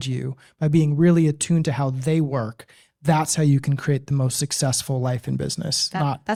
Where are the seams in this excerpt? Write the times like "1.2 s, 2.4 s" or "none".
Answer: none